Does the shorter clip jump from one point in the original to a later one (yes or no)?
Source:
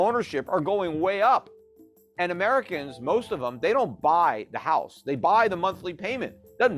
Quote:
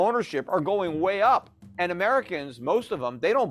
yes